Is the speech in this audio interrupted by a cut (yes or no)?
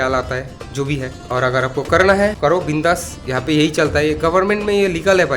yes